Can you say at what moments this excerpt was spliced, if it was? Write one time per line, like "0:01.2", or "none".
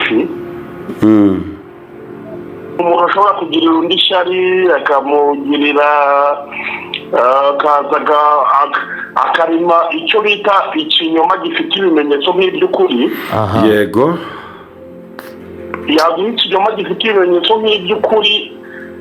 0:02.8

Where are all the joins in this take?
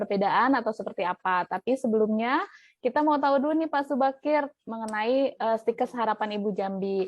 0:01.9

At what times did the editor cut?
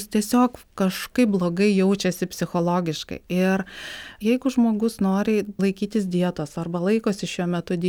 0:04.1
0:05.6

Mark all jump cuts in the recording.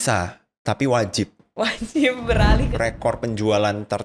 0:02.6

